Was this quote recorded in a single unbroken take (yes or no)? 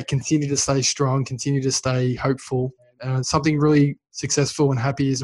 no